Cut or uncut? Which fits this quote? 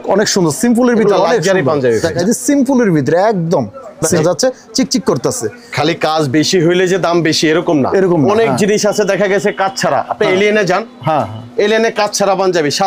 cut